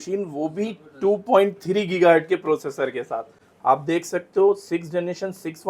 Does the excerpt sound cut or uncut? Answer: uncut